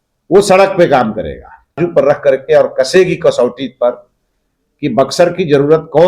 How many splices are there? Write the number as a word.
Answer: one